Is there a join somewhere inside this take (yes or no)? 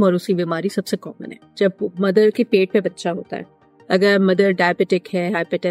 yes